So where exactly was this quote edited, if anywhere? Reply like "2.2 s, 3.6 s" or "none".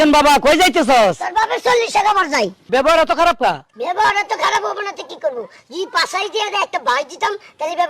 2.6 s, 3.7 s

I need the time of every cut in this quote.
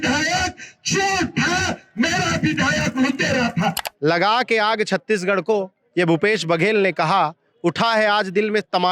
3.9 s

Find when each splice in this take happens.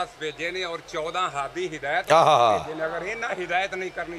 none

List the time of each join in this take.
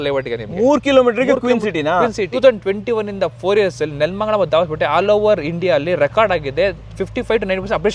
2.2 s

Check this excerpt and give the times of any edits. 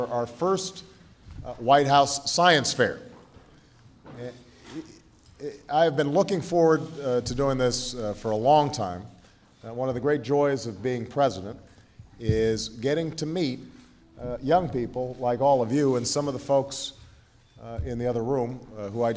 15.5 s

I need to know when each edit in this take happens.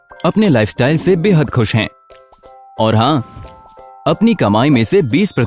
none

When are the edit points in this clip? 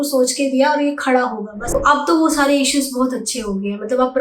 1.7 s

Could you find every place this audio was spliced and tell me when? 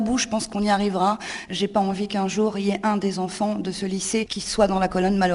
1.4 s, 4.4 s

